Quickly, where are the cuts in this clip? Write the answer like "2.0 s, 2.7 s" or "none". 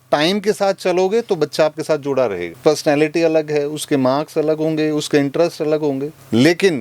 2.6 s